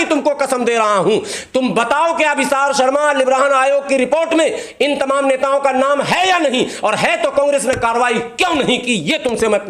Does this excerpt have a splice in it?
no; 0 cuts

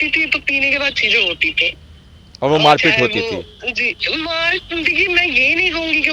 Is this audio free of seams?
yes; 0 cuts

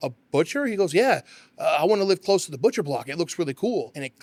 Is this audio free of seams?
yes; 0 cuts

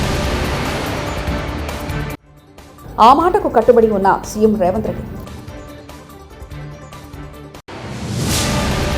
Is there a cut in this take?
yes; 2 cuts; at 2.2 s, 7.6 s

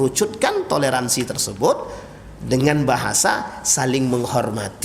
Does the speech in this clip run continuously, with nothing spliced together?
yes; 0 cuts

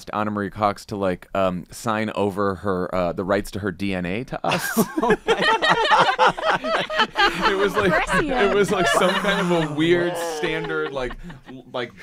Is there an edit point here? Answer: no; 0 cuts

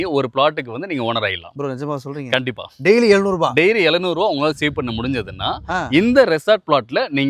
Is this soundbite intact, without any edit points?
yes; 0 cuts

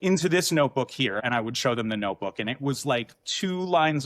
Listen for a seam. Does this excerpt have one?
yes; 1 cut; at 1.2 s

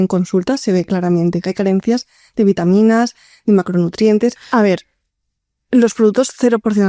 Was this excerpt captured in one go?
no; 1 cut; at 4.4 s

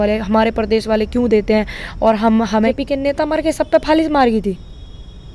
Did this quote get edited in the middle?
yes; 1 cut; at 2.7 s

